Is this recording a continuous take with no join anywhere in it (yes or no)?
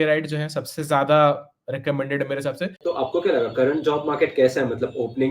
no